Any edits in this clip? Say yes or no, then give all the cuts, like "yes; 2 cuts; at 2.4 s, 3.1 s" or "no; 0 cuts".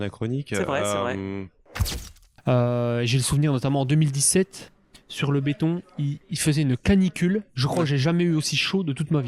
yes; 1 cut; at 1.9 s